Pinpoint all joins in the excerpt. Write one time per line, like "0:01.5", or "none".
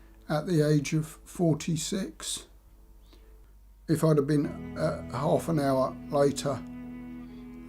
0:03.5